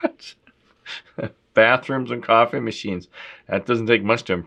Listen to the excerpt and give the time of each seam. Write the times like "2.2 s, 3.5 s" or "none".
none